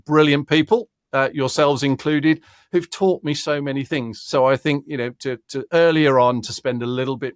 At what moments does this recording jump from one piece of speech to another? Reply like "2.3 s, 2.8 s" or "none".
none

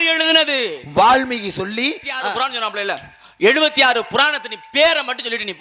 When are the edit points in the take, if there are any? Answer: 2.3 s

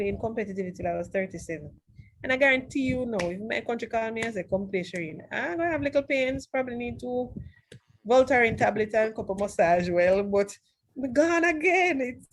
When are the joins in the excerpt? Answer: none

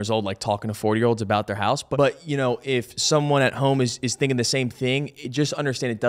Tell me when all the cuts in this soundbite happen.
1.8 s

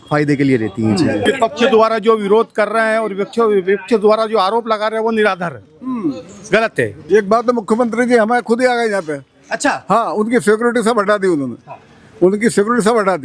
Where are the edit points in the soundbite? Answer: 1.2 s, 7.0 s

